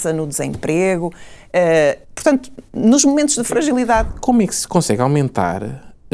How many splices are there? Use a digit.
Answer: 1